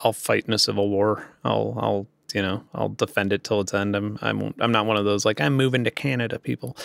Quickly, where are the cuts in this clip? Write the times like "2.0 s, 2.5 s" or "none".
none